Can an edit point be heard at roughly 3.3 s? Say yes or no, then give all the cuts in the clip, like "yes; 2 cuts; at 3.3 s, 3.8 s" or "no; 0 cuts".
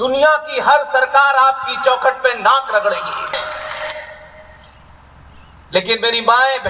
yes; 1 cut; at 3.3 s